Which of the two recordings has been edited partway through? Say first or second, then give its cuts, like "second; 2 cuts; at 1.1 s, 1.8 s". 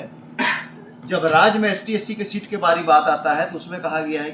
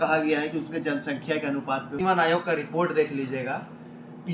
second; 1 cut; at 1.9 s